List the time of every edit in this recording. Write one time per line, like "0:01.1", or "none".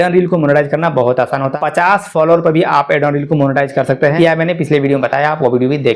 0:01.5
0:04.2